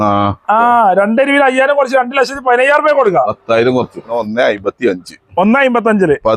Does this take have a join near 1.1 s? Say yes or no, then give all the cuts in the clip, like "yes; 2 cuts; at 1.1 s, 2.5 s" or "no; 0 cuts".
no; 1 cut; at 4.2 s